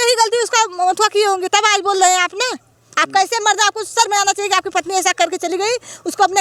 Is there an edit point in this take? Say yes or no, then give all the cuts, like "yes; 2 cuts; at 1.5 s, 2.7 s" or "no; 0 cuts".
no; 0 cuts